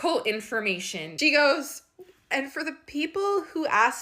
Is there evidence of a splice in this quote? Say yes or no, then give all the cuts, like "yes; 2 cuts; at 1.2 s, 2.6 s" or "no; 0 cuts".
yes; 1 cut; at 1.2 s